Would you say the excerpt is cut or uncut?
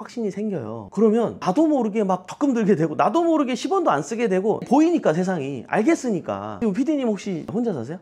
uncut